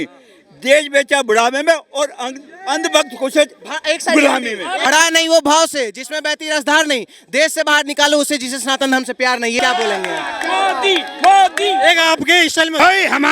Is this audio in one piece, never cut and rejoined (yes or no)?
no